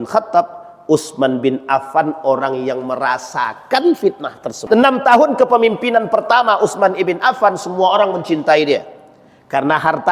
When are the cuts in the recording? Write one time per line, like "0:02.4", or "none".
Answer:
0:04.7